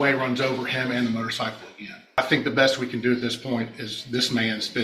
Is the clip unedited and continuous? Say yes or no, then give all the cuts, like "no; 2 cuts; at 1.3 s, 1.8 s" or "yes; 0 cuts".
no; 1 cut; at 2.2 s